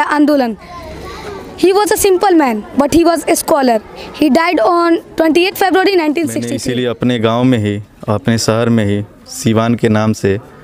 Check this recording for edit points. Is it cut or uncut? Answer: cut